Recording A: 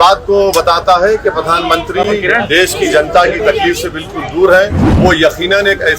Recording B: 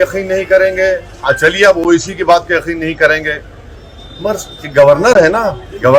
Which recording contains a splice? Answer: A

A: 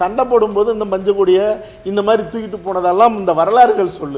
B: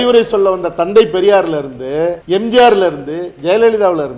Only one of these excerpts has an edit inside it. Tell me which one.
B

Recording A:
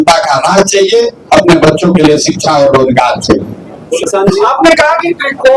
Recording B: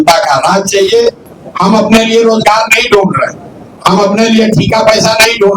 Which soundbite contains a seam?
B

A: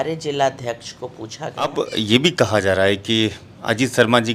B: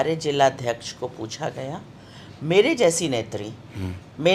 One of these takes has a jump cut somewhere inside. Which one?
A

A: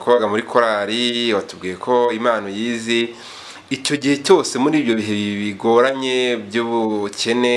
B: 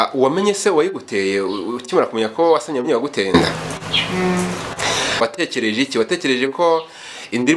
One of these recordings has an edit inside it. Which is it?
B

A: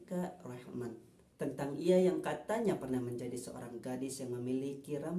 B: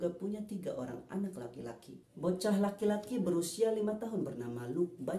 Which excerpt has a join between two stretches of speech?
B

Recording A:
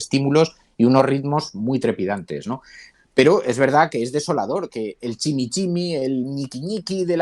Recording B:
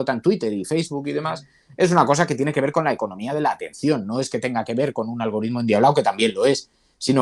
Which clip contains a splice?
A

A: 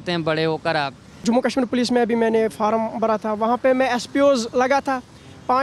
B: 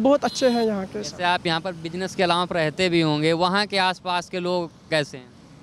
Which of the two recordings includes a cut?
A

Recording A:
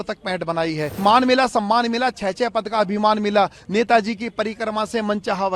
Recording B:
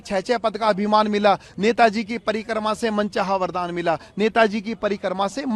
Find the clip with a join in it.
A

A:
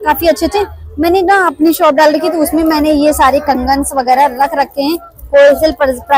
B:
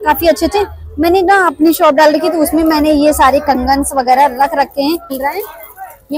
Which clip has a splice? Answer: B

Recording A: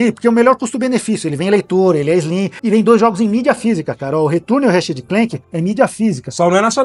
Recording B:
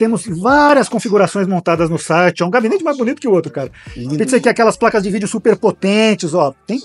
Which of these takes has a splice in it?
A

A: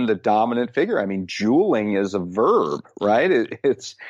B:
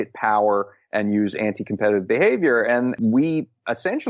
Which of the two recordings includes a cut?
B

